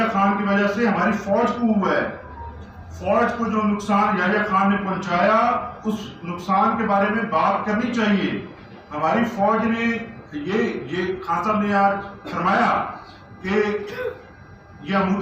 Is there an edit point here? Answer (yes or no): no